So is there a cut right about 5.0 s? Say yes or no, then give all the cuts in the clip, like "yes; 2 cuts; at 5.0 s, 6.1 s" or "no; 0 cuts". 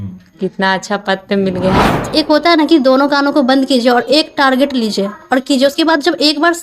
no; 1 cut; at 2.1 s